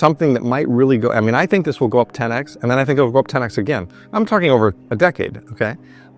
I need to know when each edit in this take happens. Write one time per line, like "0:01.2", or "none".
none